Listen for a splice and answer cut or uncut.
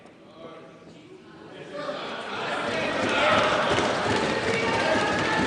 uncut